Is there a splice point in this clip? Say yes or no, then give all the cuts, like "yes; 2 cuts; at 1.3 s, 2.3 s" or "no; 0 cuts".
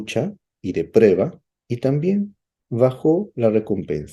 no; 0 cuts